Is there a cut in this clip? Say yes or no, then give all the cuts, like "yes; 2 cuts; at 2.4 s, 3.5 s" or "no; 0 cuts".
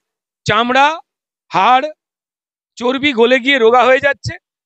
no; 0 cuts